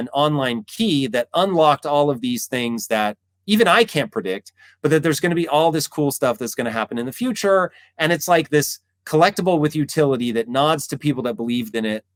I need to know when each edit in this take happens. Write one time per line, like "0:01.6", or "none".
none